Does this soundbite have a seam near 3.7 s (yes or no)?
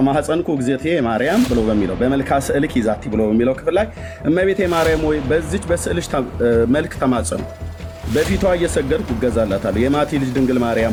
no